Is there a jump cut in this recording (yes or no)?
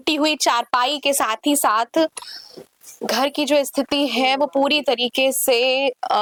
no